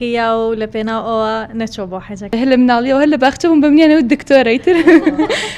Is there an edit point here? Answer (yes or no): yes